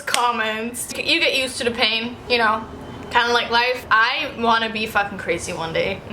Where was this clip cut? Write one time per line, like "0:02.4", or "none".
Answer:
0:00.9
0:02.2
0:03.8